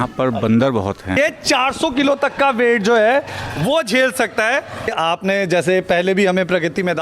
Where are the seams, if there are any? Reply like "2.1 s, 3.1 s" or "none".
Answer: 1.2 s, 4.9 s